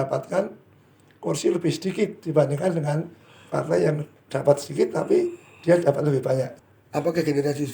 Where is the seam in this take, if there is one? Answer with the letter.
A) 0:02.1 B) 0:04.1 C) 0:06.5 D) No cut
C